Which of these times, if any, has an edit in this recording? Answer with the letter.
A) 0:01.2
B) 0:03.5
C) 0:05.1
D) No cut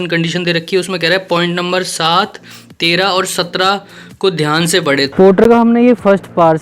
C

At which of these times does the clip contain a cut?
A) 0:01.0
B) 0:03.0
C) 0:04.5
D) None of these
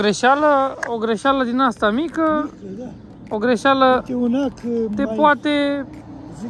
D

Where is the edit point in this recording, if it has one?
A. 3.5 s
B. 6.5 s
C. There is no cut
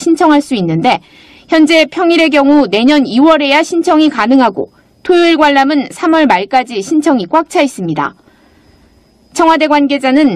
A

